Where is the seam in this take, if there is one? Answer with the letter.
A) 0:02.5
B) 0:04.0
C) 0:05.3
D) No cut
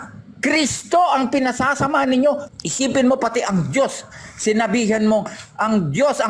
A